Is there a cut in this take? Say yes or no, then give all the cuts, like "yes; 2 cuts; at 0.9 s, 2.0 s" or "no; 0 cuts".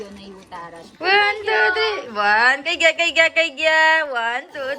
yes; 1 cut; at 0.9 s